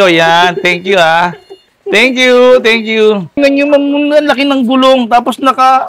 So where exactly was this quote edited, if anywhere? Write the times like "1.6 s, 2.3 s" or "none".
3.3 s

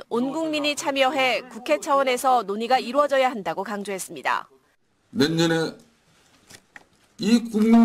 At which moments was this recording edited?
none

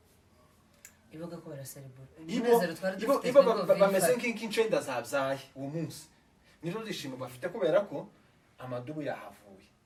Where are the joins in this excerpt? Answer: none

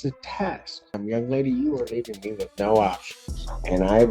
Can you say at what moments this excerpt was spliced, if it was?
1.0 s

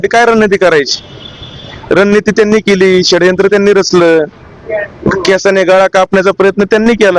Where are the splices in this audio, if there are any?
none

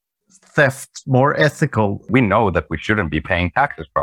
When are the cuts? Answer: 2.0 s

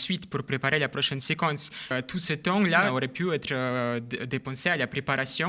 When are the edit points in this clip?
1.9 s, 2.9 s

